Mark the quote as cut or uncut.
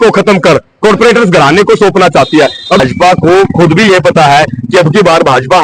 cut